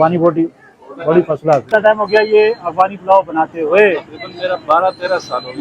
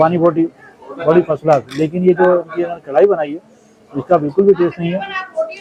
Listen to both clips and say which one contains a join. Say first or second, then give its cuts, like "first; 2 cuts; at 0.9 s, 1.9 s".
first; 1 cut; at 1.7 s